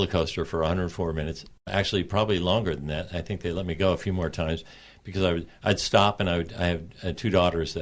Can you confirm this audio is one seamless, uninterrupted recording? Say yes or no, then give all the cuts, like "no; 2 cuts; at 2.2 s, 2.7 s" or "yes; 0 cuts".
no; 1 cut; at 1.7 s